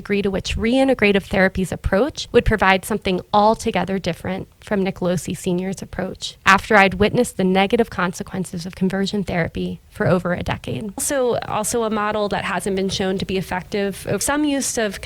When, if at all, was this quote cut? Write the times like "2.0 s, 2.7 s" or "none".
11.0 s, 14.2 s